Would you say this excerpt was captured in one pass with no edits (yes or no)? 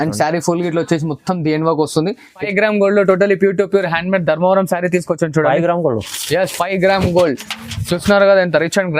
no